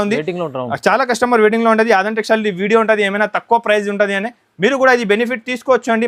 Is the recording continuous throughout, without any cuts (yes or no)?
yes